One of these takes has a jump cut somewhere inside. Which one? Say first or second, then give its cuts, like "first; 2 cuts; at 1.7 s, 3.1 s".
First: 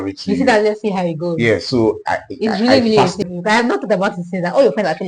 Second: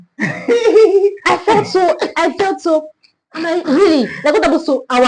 first; 1 cut; at 3.2 s